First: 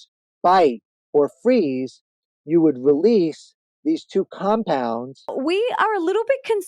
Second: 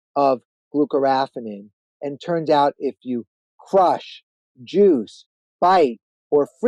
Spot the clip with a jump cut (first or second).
first